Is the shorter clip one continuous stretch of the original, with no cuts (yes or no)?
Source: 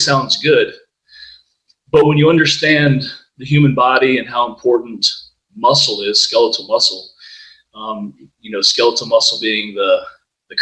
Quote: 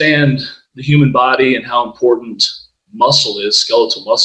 yes